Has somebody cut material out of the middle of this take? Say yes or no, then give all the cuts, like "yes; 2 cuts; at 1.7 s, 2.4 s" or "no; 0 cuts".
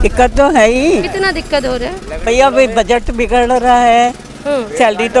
no; 0 cuts